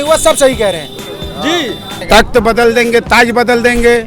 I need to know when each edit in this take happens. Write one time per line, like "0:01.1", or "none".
0:02.0